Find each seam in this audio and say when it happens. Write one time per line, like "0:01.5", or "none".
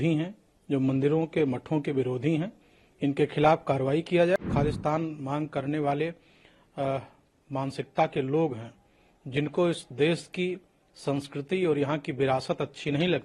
0:04.4